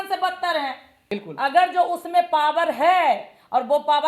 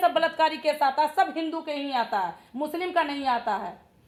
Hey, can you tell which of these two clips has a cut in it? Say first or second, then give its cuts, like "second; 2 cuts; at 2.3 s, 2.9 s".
first; 1 cut; at 0.9 s